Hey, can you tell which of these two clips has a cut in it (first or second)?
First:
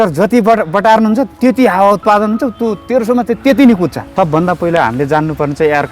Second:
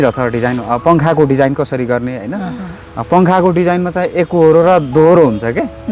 first